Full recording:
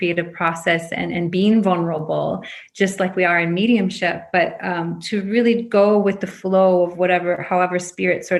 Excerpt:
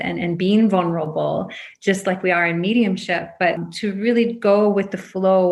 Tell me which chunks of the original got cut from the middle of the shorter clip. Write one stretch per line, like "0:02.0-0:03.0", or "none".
0:04.6-0:05.0